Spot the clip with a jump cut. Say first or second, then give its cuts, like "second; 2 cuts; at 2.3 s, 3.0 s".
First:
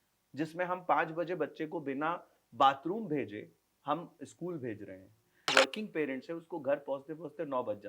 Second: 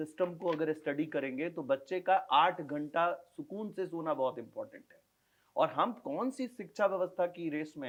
first; 1 cut; at 5.5 s